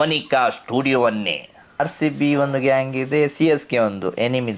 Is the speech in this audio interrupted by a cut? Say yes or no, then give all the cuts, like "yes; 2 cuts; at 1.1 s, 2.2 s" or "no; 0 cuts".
yes; 1 cut; at 1.8 s